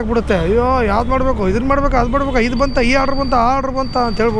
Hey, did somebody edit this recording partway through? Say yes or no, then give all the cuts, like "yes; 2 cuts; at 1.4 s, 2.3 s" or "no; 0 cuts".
no; 0 cuts